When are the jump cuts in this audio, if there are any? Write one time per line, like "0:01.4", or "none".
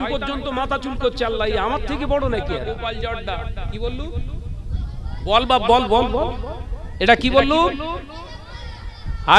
0:02.6